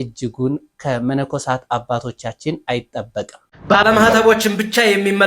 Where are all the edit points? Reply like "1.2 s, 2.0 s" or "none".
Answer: 3.4 s

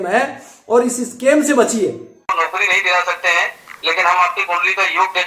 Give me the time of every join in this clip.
2.3 s

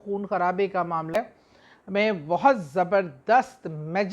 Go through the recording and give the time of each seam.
1.1 s

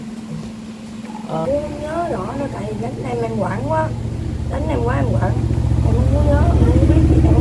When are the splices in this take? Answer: 1.4 s

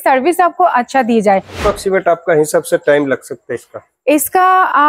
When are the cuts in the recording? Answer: 1.6 s

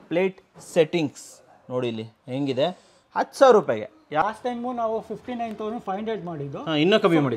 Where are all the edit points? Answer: 4.2 s

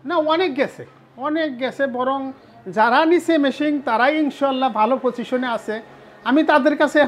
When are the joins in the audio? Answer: none

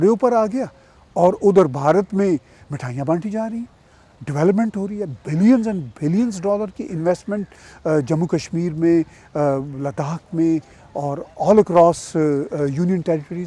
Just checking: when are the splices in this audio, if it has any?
none

